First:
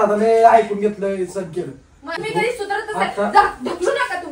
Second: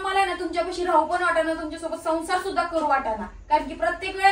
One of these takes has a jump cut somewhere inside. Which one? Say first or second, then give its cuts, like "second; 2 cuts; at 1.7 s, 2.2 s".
first; 1 cut; at 2.2 s